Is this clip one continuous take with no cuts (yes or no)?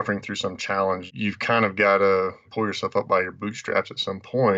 no